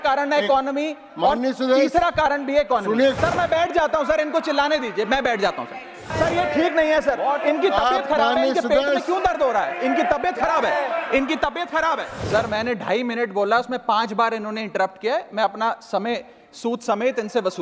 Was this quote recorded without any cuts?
no; 3 cuts; at 3.2 s, 6.1 s, 12.1 s

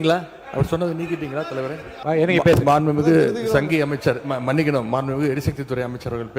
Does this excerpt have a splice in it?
yes; 1 cut; at 1.9 s

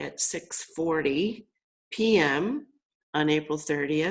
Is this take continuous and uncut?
yes; 0 cuts

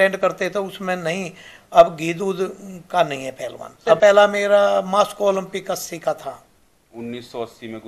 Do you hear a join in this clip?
yes; 1 cut; at 4.0 s

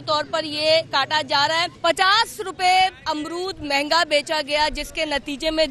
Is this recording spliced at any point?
yes; 1 cut; at 1.7 s

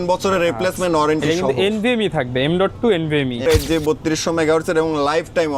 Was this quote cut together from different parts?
yes; 1 cut; at 3.5 s

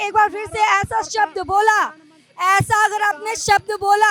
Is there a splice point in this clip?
no; 0 cuts

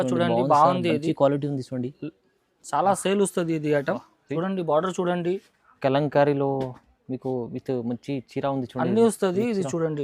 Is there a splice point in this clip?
yes; 1 cut; at 4.2 s

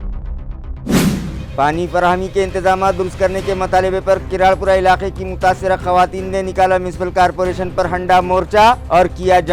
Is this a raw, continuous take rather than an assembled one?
yes; 0 cuts

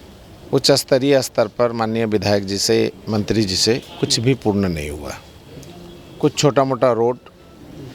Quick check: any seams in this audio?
no; 0 cuts

